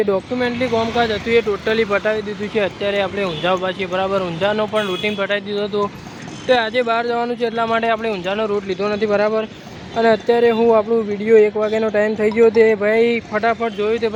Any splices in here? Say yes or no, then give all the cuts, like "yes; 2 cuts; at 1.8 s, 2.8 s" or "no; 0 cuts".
no; 0 cuts